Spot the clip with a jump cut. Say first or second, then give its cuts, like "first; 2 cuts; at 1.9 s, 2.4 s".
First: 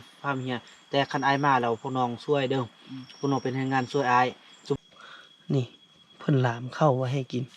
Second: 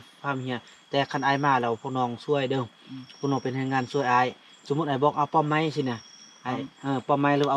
first; 1 cut; at 4.8 s